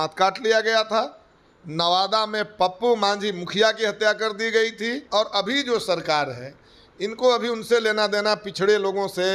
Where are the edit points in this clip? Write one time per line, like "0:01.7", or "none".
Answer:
0:05.0